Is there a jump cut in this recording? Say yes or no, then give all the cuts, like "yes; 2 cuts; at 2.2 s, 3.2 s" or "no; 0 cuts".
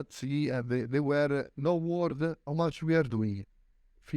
yes; 2 cuts; at 1.5 s, 2.4 s